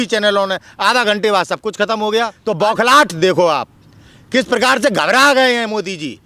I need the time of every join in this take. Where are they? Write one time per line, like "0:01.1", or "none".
0:02.4